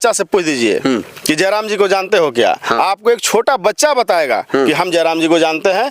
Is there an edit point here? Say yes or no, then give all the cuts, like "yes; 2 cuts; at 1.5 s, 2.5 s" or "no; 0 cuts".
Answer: no; 0 cuts